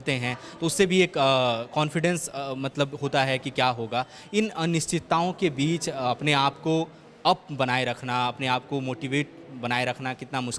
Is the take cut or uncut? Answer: uncut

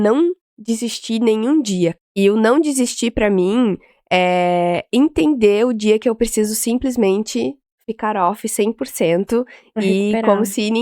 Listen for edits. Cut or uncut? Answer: cut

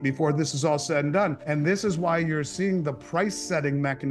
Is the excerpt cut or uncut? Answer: cut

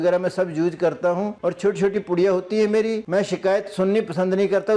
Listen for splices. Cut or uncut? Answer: uncut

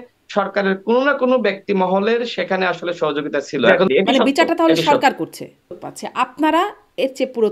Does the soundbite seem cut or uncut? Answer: cut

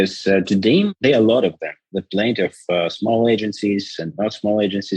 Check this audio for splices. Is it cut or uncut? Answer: cut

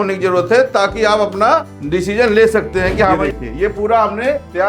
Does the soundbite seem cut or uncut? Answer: cut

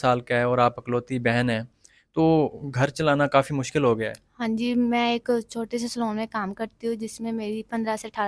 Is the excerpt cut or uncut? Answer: uncut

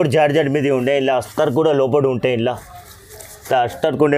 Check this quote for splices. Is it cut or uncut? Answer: uncut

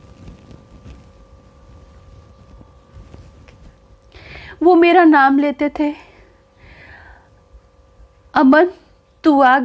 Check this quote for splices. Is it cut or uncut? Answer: cut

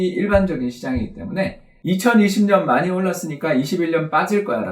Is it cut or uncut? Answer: cut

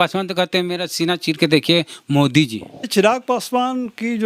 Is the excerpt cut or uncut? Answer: cut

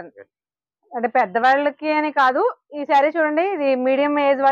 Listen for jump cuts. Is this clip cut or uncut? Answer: uncut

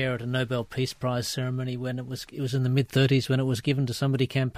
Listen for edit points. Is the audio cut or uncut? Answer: uncut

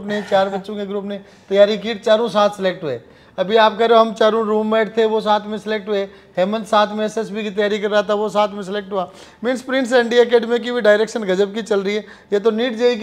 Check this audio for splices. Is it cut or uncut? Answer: uncut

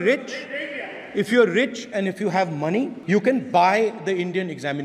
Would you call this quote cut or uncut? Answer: cut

